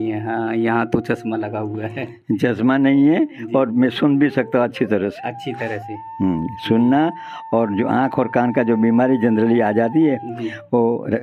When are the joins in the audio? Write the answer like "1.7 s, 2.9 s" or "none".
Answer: none